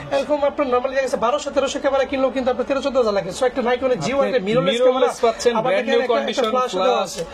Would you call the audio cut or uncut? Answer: uncut